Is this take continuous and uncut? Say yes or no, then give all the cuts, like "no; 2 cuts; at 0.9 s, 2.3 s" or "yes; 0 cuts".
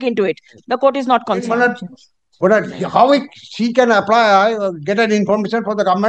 no; 1 cut; at 1.5 s